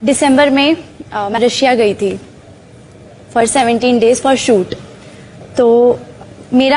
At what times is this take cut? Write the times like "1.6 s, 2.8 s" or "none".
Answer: 1.4 s